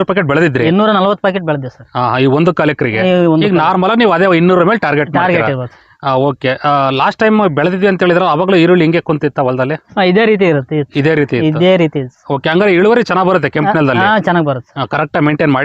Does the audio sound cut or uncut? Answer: uncut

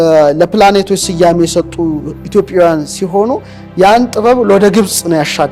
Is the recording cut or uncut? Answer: uncut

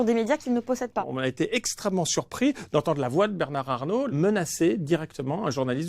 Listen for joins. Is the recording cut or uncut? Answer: cut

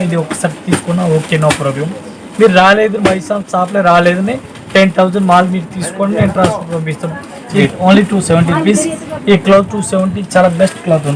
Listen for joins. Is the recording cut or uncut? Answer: cut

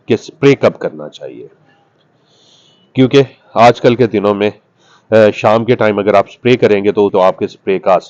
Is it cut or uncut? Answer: cut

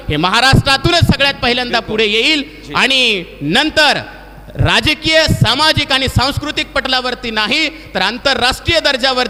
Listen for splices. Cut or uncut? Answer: uncut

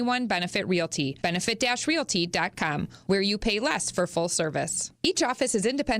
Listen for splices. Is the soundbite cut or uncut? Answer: cut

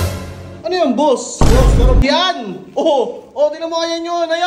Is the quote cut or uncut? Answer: cut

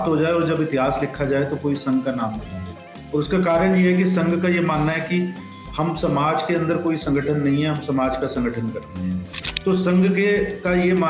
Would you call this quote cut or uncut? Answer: cut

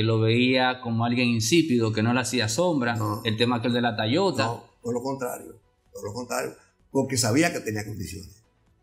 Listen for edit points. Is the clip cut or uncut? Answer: uncut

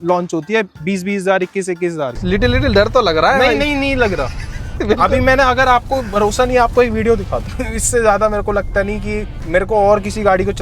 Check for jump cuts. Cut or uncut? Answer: cut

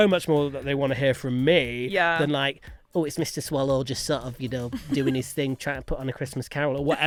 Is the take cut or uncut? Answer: uncut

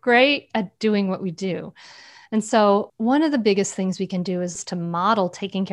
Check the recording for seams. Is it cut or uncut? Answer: cut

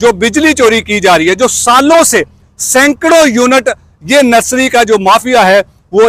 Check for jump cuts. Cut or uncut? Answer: uncut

